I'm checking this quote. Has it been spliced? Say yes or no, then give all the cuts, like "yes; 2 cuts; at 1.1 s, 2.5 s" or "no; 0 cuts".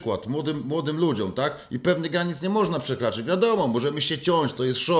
no; 0 cuts